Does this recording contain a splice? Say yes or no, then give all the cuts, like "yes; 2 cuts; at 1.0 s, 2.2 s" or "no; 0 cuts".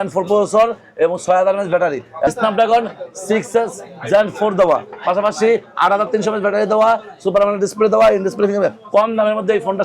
yes; 1 cut; at 2.3 s